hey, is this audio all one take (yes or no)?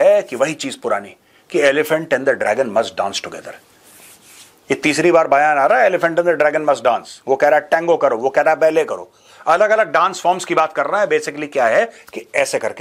yes